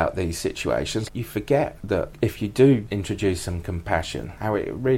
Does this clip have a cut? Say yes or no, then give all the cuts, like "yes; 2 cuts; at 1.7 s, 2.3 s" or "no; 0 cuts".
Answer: yes; 3 cuts; at 1.0 s, 2.1 s, 2.8 s